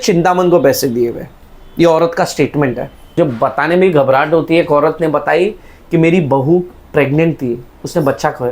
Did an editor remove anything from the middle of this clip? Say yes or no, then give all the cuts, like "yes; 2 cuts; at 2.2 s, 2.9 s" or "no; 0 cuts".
yes; 1 cut; at 3.2 s